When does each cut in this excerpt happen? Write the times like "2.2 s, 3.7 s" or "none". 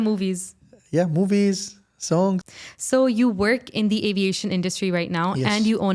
2.4 s